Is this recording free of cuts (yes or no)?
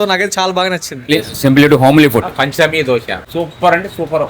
no